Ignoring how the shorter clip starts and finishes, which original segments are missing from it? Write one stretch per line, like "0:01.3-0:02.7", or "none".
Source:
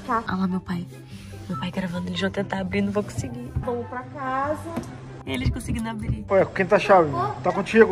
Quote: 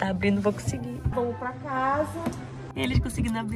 none